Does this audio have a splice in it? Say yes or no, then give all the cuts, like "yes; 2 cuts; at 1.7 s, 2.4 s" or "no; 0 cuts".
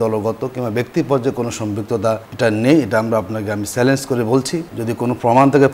yes; 2 cuts; at 2.3 s, 4.7 s